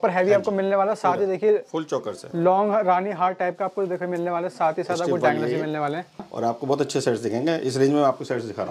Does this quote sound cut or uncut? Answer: cut